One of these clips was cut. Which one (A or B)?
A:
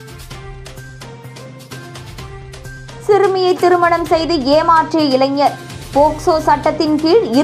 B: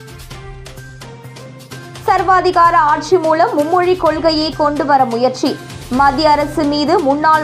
A